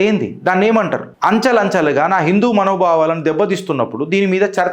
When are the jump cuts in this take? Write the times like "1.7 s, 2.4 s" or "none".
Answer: 1.0 s

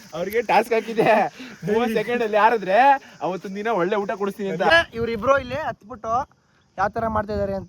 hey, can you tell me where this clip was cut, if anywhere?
4.7 s

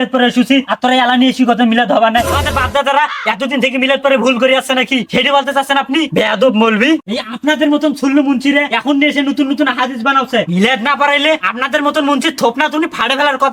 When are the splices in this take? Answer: 2.3 s, 7.1 s, 10.5 s

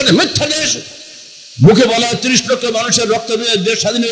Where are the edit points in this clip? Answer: none

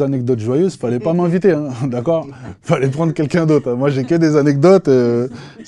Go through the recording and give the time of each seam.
none

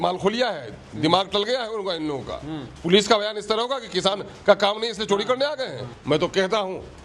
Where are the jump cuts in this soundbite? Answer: 5.9 s

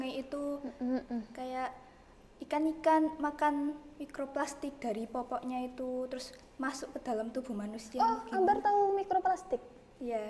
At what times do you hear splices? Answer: none

